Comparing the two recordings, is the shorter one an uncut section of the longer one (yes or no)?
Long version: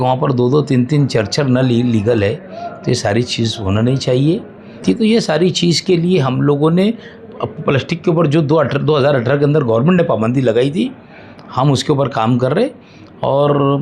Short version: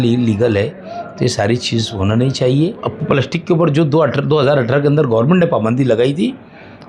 no